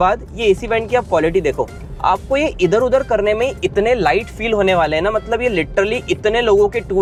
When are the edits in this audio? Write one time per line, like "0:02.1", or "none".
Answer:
none